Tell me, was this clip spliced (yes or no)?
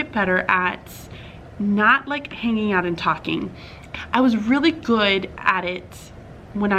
no